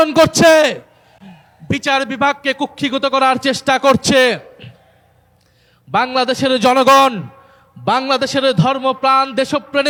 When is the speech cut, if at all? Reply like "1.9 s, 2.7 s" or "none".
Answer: none